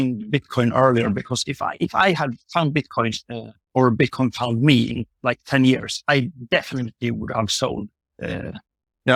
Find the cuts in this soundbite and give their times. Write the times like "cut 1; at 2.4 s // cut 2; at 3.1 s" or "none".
none